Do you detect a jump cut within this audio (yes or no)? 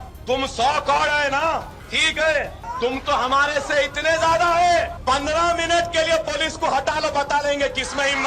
no